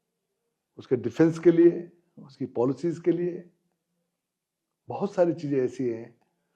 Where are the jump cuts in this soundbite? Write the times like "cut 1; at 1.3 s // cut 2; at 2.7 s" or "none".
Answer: none